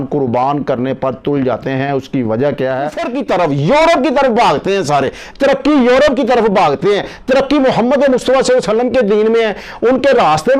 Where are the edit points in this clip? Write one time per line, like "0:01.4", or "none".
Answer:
0:02.7